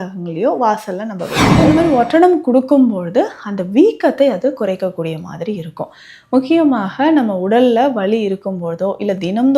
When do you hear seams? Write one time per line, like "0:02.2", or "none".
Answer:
0:01.4